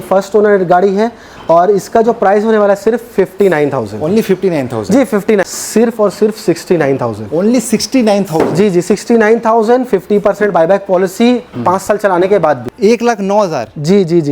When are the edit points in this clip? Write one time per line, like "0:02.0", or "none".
0:05.4
0:12.7